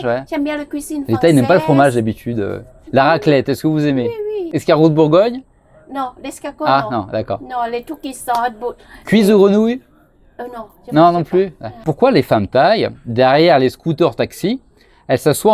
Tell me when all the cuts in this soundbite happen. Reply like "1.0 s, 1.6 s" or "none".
4.4 s, 11.8 s

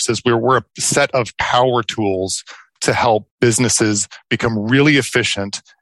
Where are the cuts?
3.3 s

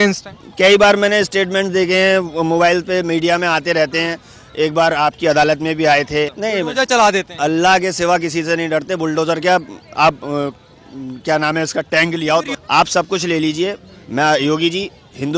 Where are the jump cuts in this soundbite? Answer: 6.4 s, 12.5 s

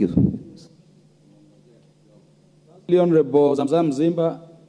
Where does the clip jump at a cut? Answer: none

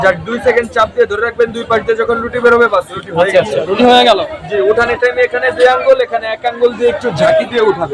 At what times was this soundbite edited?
none

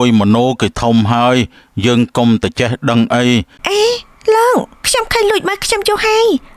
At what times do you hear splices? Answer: 3.6 s

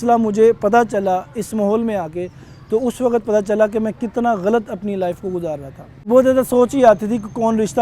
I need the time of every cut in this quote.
6.1 s

